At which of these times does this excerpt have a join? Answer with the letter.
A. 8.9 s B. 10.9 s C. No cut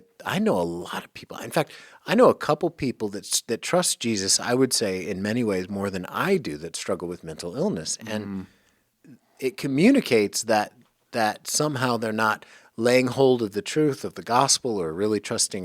A